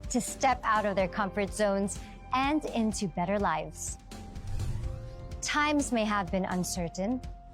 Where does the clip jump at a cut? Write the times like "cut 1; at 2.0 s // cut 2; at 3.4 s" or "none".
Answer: cut 1; at 1.2 s // cut 2; at 3.1 s // cut 3; at 4.8 s // cut 4; at 6.6 s